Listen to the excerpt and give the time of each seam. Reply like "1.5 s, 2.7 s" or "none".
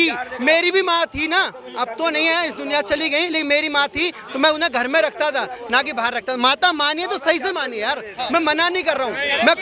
none

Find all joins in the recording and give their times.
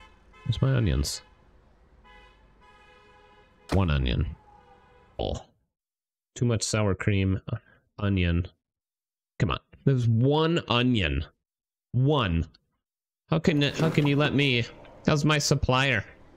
5.2 s

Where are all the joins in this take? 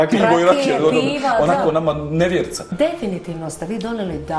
2.7 s

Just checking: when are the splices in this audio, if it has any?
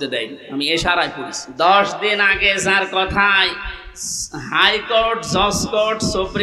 1.4 s

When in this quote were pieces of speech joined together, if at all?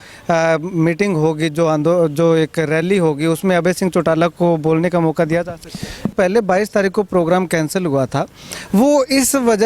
6.1 s

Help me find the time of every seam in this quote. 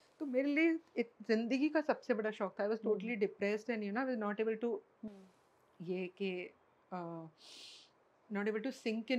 none

